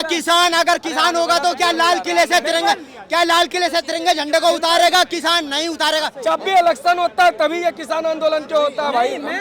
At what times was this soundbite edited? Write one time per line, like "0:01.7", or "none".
0:06.1